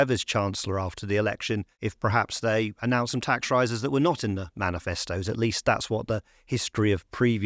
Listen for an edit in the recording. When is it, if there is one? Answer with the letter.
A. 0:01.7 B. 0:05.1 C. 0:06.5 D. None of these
A